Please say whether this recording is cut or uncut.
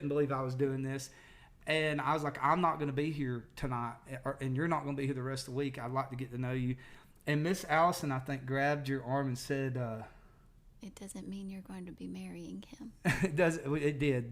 uncut